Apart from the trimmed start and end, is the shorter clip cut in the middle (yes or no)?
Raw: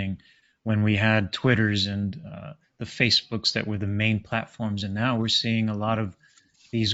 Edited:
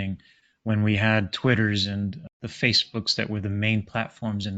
yes